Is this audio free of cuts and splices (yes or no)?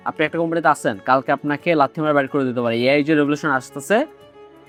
yes